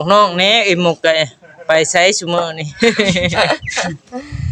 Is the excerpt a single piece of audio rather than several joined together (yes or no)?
yes